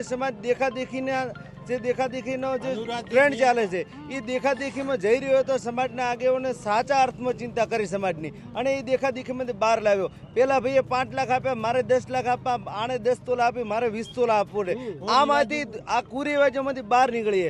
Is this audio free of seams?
yes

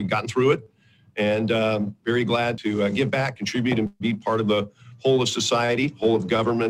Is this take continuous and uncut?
no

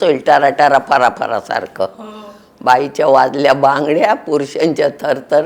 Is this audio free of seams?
yes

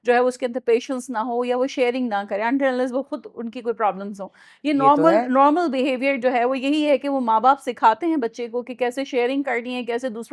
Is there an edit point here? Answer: no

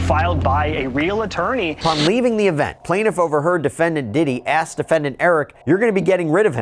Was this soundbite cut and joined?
yes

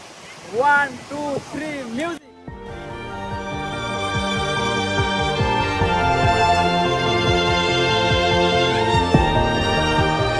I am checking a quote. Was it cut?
no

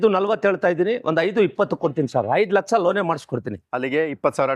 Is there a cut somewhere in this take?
no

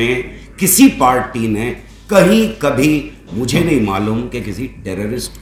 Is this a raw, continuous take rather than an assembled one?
yes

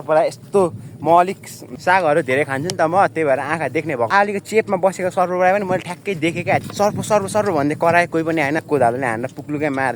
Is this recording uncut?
no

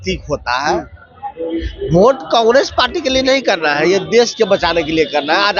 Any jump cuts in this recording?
no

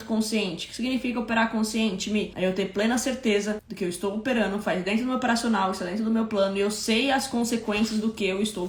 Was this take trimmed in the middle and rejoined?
no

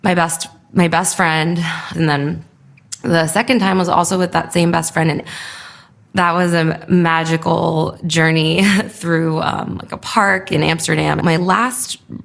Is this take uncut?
no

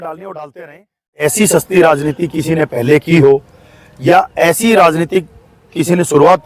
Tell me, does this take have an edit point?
yes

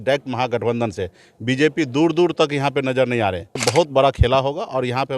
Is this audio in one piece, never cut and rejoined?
no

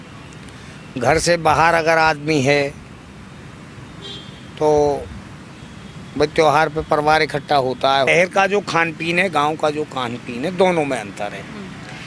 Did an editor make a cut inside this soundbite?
yes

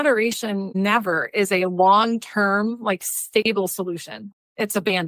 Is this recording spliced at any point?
yes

